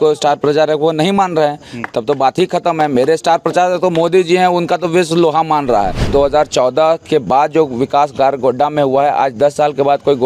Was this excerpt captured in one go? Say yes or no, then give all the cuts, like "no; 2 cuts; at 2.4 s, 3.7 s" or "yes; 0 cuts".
no; 1 cut; at 6.1 s